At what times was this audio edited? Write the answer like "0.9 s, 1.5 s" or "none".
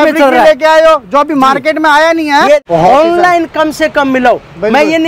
2.6 s